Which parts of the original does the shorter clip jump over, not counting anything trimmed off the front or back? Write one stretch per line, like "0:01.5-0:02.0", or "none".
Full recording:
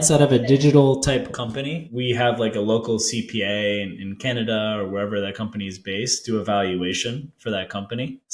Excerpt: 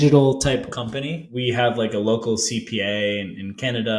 none